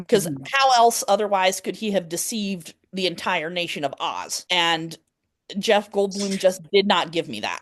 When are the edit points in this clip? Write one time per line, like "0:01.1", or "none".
0:04.3

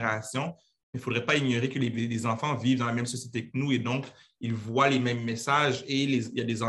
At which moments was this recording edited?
none

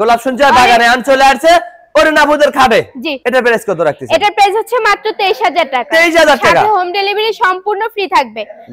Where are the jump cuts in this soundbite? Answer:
none

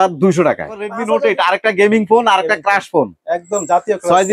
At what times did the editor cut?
0:01.0

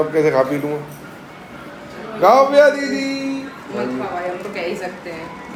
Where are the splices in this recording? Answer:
none

